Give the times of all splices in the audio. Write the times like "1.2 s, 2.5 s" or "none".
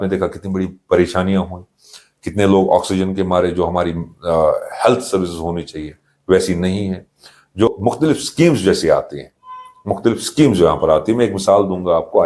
7.7 s